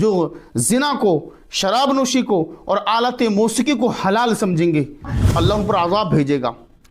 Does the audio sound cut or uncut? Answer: cut